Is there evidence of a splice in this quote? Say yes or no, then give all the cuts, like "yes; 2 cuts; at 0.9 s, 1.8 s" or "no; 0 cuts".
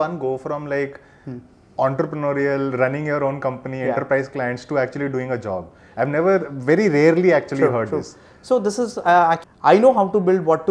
yes; 1 cut; at 9.5 s